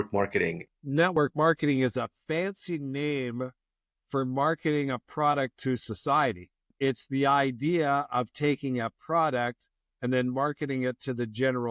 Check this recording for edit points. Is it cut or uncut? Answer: cut